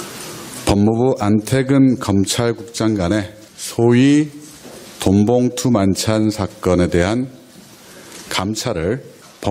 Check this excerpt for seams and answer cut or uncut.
cut